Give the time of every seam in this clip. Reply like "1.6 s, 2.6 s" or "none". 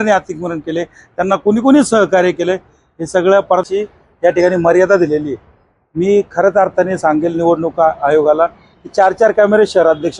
3.6 s